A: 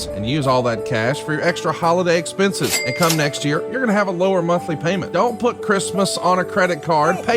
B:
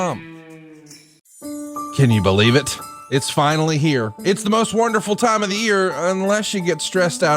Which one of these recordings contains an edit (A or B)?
B